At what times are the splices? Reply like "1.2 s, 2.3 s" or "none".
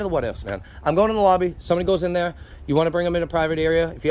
none